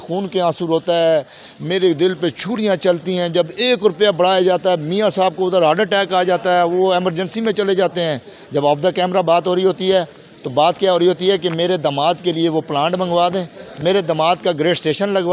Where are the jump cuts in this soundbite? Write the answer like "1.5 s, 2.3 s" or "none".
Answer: none